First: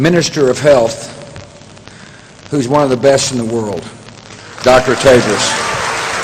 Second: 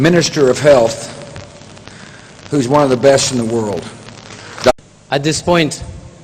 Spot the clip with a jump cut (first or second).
first